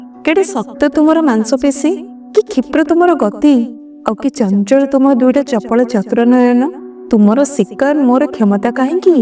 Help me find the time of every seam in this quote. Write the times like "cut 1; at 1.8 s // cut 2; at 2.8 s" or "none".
none